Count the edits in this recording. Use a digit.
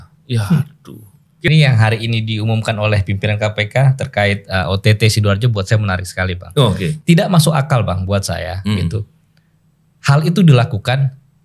2